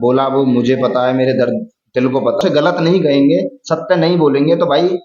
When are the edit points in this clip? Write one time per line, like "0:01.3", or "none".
0:02.4